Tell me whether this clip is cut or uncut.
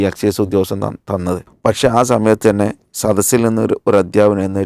cut